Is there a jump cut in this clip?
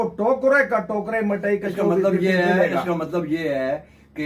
no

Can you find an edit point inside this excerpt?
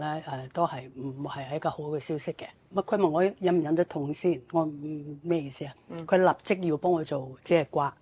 yes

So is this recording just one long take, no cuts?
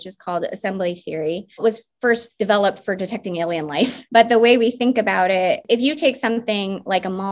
no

